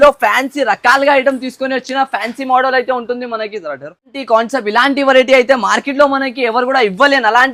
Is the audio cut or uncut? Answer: uncut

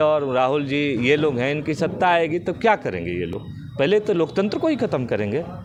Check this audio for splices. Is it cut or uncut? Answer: uncut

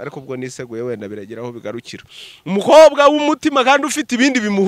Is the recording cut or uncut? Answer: uncut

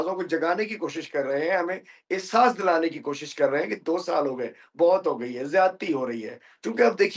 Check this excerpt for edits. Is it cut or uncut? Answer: uncut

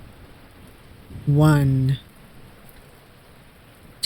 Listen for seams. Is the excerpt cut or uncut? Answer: cut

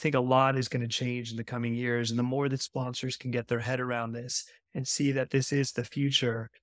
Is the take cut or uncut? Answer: uncut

